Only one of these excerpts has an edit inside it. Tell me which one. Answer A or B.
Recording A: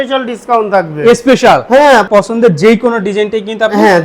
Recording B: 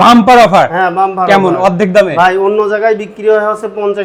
A